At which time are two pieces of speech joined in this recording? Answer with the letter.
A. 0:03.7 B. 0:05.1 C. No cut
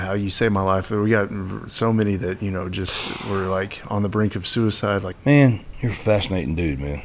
B